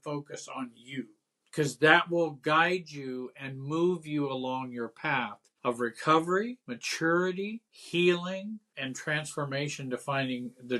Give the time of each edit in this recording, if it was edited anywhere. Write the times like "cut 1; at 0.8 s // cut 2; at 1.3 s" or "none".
none